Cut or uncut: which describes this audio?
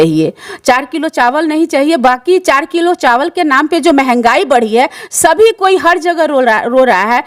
uncut